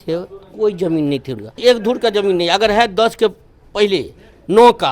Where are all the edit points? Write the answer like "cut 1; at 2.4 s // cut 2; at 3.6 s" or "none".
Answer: cut 1; at 1.6 s